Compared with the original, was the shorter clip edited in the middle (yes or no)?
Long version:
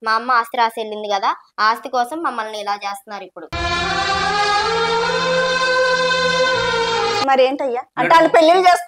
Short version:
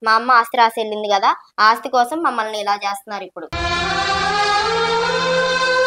no